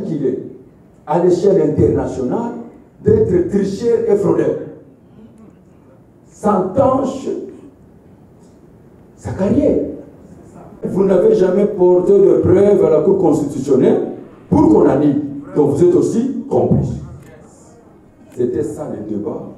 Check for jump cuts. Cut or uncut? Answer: uncut